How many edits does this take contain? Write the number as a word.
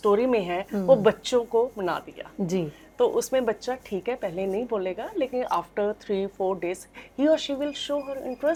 zero